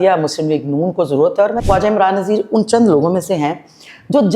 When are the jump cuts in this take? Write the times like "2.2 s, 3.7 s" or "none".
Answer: 1.6 s